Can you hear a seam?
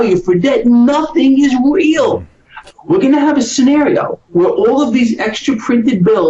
yes; 1 cut; at 2.6 s

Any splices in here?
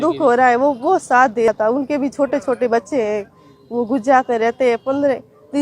yes; 1 cut; at 1.5 s

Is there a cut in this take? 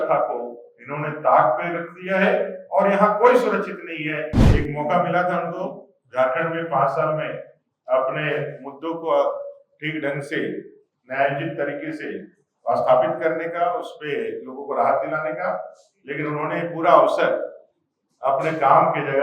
yes; 1 cut; at 4.4 s

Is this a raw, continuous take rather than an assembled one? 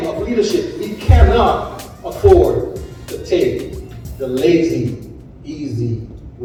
yes; 0 cuts

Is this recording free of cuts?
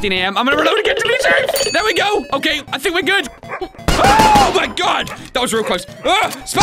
no; 2 cuts; at 1.6 s, 3.3 s

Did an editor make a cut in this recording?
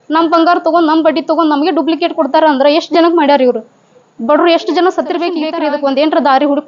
yes; 1 cut; at 5.5 s

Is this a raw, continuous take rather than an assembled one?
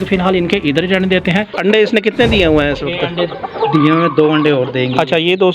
no; 1 cut; at 1.5 s

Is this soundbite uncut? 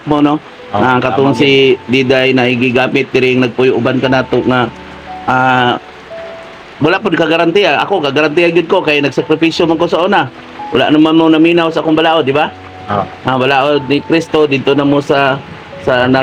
yes; 0 cuts

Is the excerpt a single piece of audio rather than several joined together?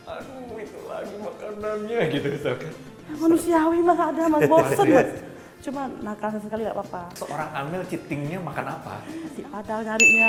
yes; 0 cuts

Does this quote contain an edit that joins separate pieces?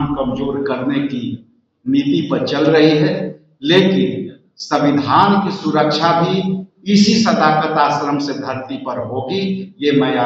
no; 0 cuts

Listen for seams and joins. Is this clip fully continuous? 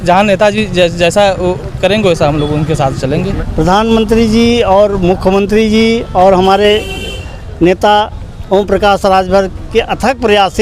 no; 1 cut; at 3.4 s

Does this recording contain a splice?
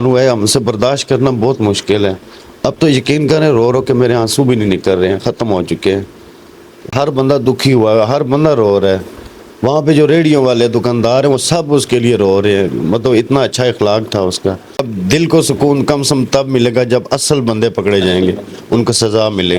yes; 2 cuts; at 6.9 s, 14.9 s

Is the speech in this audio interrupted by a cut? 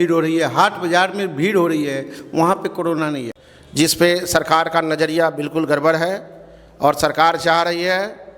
yes; 1 cut; at 3.3 s

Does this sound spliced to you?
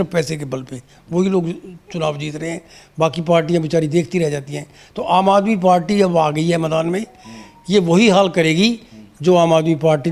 no; 0 cuts

